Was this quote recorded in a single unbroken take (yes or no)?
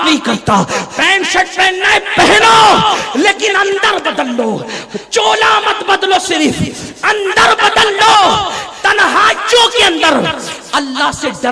yes